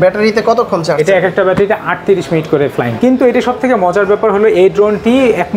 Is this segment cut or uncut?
cut